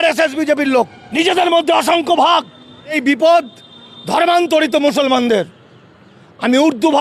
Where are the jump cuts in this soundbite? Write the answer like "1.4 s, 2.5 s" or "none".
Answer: 1.0 s, 3.0 s